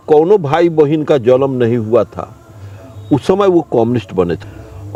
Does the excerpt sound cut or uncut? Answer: uncut